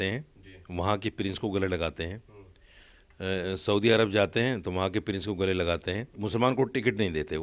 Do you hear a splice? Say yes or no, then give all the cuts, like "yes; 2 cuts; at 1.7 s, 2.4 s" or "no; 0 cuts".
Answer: yes; 1 cut; at 6.1 s